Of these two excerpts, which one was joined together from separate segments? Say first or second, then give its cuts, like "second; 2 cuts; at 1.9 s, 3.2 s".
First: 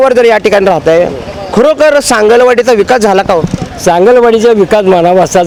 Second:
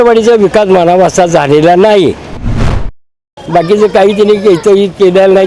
second; 1 cut; at 2.8 s